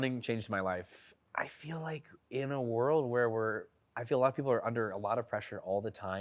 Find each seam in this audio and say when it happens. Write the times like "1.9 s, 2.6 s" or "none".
1.1 s